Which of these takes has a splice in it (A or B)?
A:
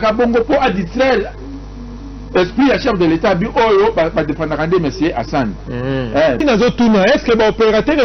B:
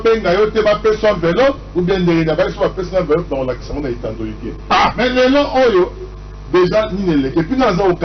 A